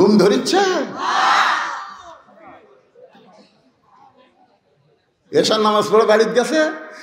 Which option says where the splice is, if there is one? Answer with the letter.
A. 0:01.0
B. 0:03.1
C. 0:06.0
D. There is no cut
B